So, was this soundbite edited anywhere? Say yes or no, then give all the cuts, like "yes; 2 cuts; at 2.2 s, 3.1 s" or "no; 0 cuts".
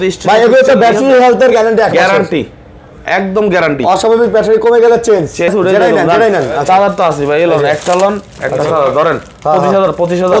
yes; 1 cut; at 5.5 s